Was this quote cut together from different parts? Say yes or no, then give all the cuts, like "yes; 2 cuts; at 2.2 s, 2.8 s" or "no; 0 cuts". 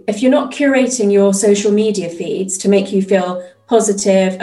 no; 0 cuts